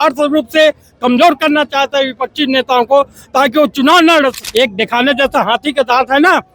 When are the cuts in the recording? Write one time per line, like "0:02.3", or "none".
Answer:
0:04.4